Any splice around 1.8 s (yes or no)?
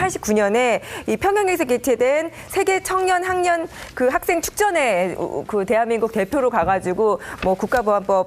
no